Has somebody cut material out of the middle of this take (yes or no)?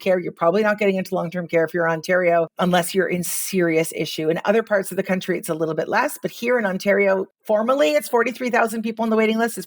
yes